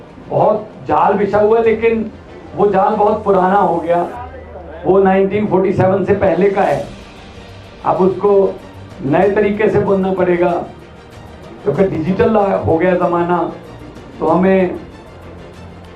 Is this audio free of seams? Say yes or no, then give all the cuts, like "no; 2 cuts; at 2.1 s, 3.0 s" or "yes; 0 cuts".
yes; 0 cuts